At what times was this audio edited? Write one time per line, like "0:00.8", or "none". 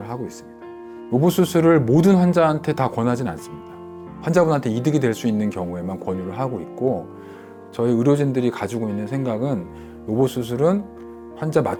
none